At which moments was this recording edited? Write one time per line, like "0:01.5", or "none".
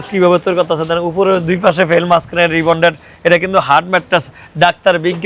none